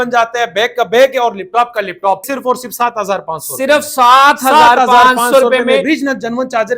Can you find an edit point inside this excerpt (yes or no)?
yes